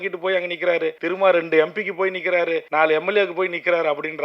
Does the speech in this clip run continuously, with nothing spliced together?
no; 2 cuts; at 1.0 s, 2.7 s

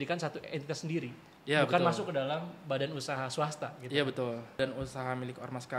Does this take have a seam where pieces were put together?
yes; 1 cut; at 4.6 s

